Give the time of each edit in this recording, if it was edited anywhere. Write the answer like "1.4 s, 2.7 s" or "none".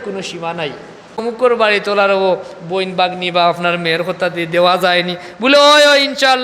1.2 s